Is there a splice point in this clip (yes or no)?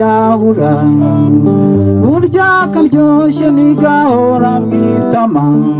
no